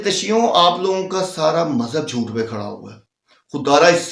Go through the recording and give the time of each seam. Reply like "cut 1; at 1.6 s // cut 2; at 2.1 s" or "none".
none

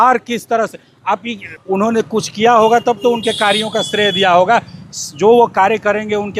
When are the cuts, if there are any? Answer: cut 1; at 1.5 s

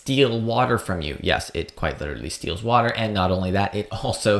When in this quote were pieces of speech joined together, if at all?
none

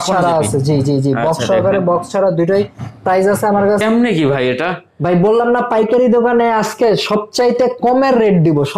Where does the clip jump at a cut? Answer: cut 1; at 3.8 s

